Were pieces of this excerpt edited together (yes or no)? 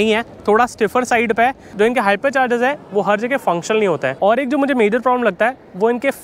yes